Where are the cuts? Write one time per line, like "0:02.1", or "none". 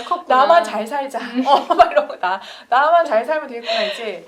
none